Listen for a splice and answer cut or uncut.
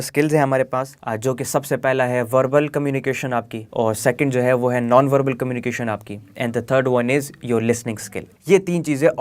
cut